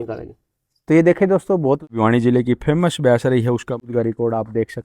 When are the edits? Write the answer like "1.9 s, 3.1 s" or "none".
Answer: 1.9 s, 3.9 s